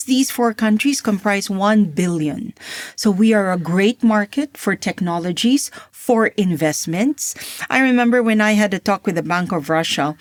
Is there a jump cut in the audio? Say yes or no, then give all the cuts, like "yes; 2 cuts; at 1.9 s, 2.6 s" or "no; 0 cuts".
no; 0 cuts